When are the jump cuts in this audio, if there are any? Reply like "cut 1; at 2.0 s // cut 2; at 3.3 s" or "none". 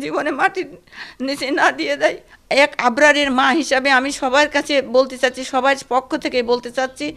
cut 1; at 2.3 s

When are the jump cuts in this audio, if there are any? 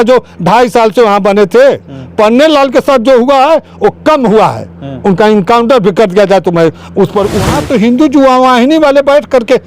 cut 1; at 7.6 s

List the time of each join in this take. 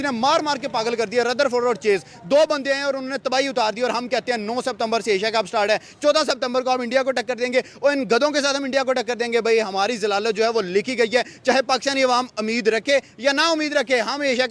none

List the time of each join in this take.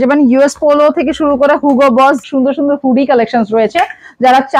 cut 1; at 2.2 s

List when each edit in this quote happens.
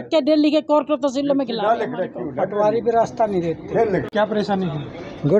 cut 1; at 4.1 s

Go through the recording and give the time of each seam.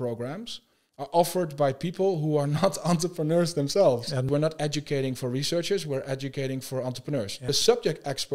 cut 1; at 4.3 s // cut 2; at 7.5 s

